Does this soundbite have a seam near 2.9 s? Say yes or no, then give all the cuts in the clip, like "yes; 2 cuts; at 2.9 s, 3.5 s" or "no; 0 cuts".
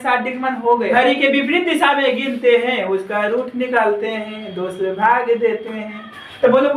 no; 1 cut; at 0.9 s